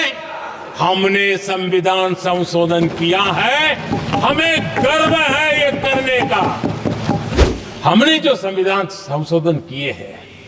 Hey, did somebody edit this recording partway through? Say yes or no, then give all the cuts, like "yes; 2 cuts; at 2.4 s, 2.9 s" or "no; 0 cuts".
yes; 1 cut; at 7.4 s